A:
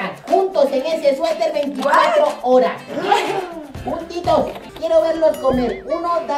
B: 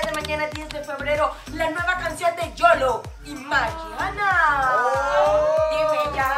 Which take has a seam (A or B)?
A